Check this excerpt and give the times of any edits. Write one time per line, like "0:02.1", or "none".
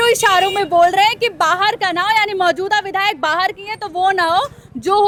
none